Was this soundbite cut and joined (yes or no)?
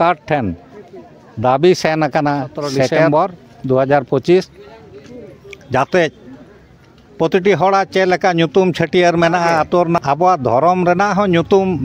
yes